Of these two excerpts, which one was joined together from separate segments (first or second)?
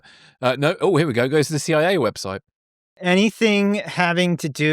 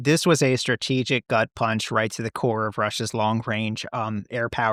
first